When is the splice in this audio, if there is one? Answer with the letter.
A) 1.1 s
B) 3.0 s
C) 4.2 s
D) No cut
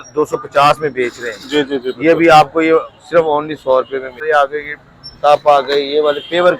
C